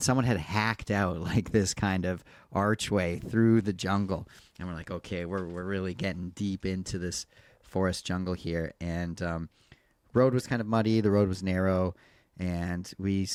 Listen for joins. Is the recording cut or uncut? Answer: uncut